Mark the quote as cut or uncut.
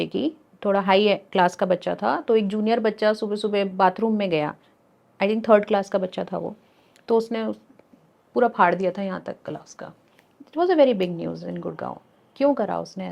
uncut